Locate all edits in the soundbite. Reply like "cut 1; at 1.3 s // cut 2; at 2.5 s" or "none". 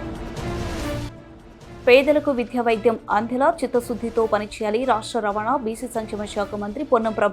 cut 1; at 1.0 s